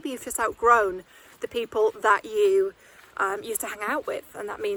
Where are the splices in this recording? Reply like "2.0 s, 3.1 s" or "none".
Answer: none

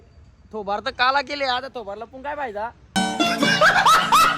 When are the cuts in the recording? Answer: 3.0 s

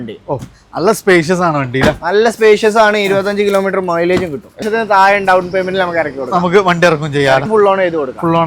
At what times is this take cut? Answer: 4.7 s, 7.5 s

